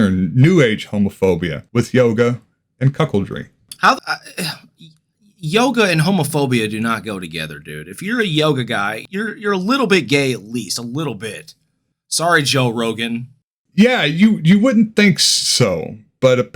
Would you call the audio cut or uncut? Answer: cut